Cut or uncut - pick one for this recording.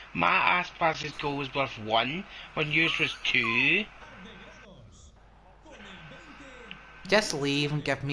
cut